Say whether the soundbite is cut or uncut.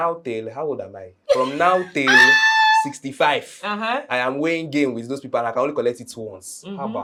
uncut